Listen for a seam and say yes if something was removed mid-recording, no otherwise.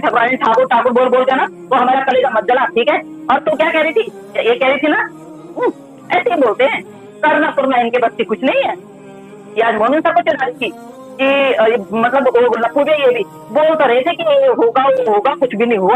no